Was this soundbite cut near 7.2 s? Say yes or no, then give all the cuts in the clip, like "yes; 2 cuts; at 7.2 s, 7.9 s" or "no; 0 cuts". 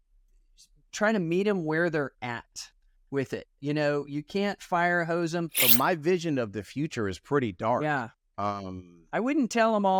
no; 1 cut; at 5.7 s